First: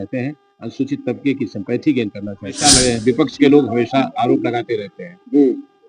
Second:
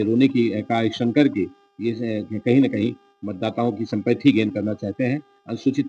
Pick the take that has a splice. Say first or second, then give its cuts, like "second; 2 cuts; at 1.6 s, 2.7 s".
first; 1 cut; at 2.6 s